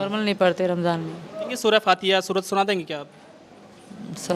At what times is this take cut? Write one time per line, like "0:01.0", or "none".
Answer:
0:01.5